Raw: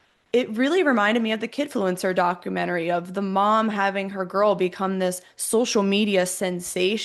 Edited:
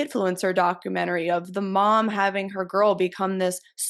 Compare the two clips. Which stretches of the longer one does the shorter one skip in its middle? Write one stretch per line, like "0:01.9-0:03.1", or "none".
none